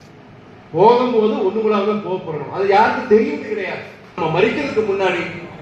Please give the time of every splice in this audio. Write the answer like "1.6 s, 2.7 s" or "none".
4.1 s